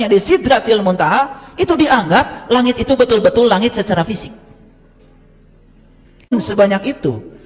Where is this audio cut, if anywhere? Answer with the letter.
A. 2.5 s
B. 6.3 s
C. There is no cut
B